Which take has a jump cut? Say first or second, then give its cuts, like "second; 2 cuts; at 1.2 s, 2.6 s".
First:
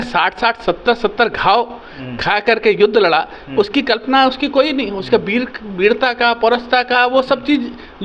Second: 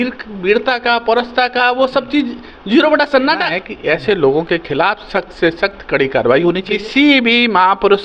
second; 2 cuts; at 3.6 s, 6.7 s